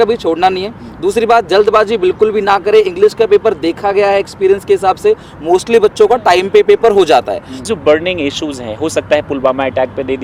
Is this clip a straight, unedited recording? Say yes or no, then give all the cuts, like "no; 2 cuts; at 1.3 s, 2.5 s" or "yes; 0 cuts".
no; 1 cut; at 7.6 s